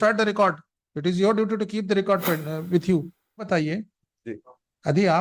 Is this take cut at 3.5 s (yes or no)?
yes